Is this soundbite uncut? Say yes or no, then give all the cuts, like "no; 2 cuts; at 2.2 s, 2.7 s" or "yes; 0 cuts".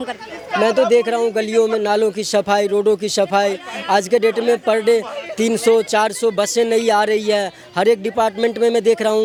yes; 0 cuts